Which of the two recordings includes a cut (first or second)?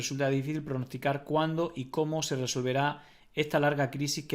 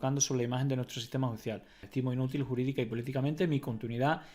second